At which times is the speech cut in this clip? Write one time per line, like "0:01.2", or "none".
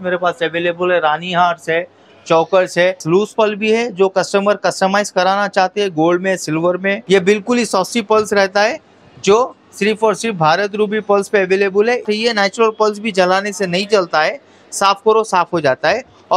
0:03.0
0:07.0
0:12.0